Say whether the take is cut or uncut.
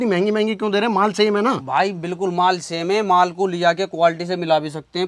uncut